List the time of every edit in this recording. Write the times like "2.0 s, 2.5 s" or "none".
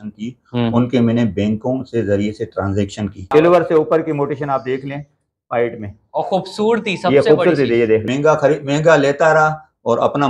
3.2 s, 8.1 s